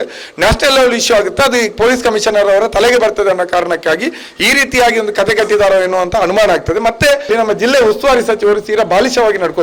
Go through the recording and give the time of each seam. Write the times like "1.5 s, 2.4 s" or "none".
7.3 s

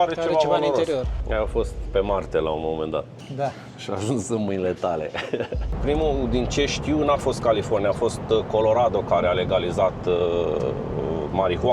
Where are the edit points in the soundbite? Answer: 1.2 s, 5.6 s

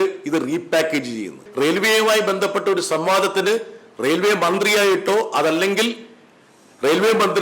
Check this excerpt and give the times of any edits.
1.4 s

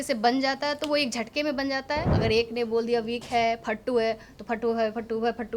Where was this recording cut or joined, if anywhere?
2.1 s

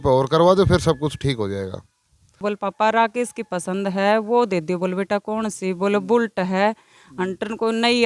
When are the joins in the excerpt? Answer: 2.4 s

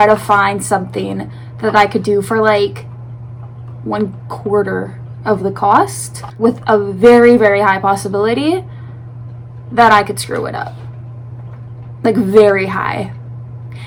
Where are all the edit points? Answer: none

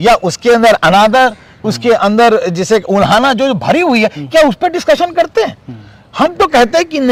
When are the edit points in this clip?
none

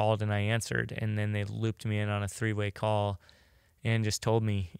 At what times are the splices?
none

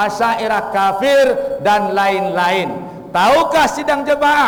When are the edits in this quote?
none

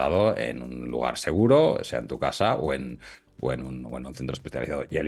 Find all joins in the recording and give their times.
none

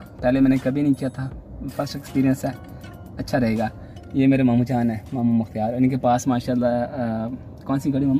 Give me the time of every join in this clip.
none

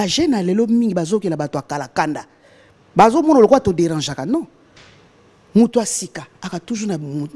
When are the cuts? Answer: none

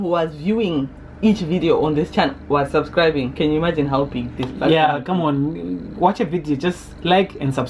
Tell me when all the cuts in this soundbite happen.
none

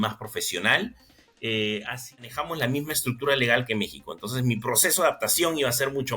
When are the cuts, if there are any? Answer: 2.2 s

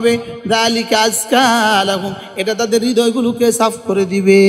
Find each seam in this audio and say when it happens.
none

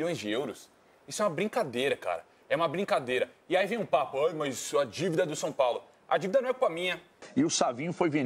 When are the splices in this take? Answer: 7.1 s

